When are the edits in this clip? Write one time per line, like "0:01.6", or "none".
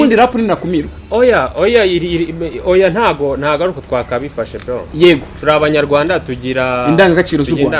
none